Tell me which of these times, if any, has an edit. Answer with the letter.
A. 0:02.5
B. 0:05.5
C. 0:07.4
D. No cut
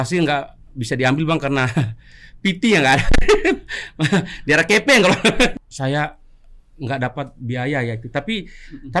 B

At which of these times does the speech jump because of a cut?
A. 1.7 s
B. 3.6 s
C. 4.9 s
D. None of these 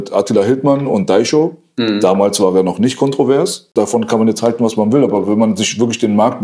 B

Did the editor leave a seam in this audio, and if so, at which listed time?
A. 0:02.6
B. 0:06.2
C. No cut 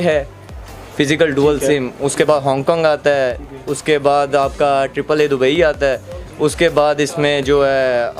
C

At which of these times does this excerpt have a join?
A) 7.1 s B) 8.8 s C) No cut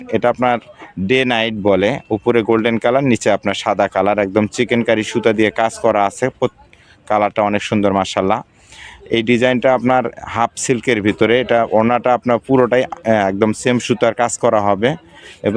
C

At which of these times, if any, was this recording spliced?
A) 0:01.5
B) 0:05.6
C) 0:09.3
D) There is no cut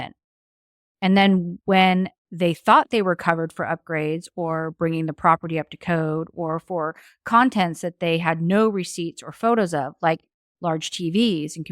A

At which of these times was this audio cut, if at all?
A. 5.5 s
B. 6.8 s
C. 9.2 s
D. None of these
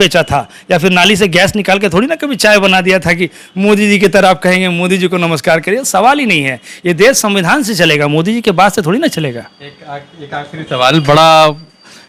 D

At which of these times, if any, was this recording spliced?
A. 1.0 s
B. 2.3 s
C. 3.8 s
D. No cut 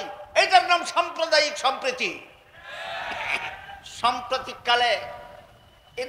C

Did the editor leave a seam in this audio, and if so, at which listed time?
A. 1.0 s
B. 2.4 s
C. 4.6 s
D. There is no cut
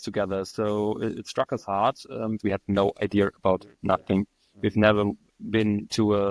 B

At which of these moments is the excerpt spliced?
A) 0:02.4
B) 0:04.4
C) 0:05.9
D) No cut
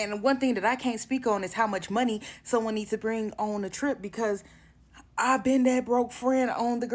D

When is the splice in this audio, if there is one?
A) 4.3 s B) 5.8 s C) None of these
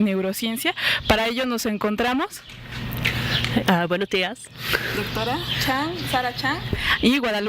B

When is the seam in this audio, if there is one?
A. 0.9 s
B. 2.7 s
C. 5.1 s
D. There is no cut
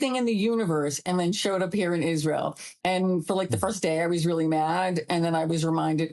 B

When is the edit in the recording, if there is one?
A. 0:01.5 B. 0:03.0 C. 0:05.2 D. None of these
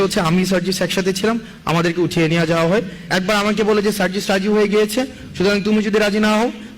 B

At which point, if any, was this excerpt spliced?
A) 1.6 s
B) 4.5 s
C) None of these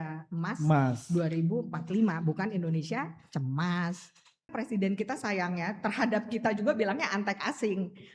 B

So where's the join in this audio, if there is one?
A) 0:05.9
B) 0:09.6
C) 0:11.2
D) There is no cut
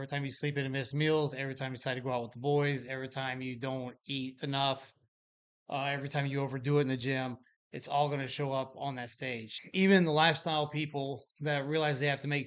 B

